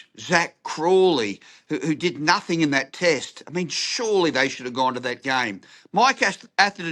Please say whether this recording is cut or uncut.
uncut